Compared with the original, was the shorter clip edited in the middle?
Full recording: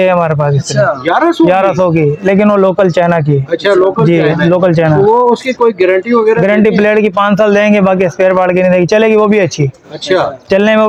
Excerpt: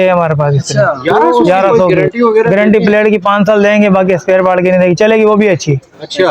yes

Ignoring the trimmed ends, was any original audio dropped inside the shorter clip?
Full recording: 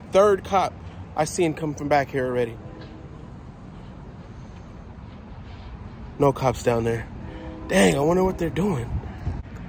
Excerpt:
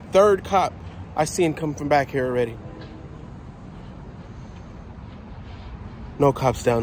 no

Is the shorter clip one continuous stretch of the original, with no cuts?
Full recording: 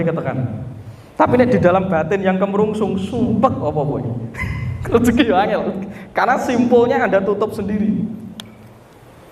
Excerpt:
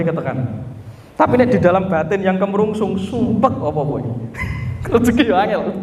yes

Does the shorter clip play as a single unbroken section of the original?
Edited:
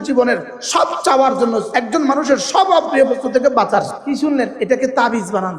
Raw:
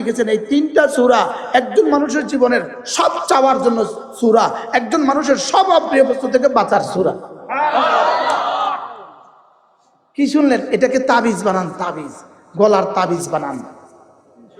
no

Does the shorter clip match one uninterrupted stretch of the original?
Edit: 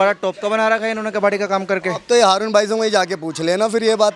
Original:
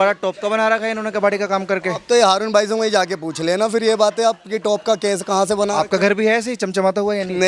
yes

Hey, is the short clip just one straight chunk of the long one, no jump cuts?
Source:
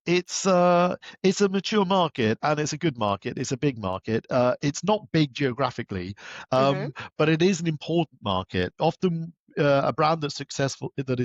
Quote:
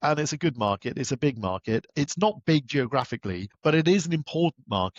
no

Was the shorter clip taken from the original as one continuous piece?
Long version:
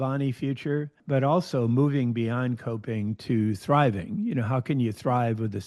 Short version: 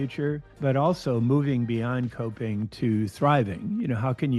yes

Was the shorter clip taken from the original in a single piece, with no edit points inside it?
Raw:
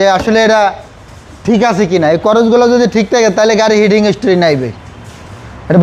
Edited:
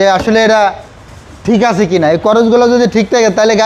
yes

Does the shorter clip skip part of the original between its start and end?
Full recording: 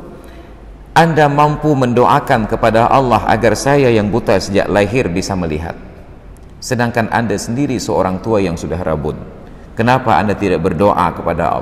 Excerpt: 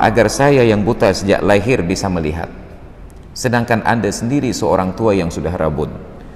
no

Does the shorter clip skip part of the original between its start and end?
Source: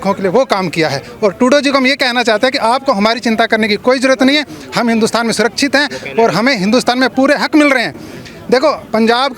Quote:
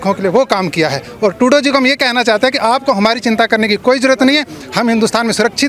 no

